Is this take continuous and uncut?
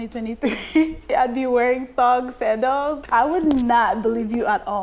no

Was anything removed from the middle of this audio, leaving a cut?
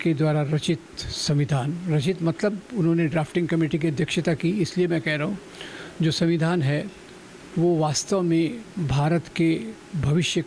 no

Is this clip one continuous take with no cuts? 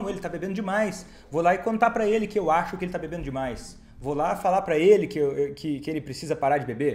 yes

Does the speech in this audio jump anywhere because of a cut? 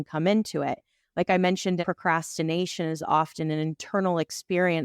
yes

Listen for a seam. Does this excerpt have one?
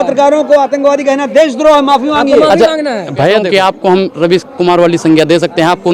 yes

